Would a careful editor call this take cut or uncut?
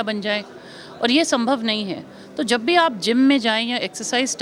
uncut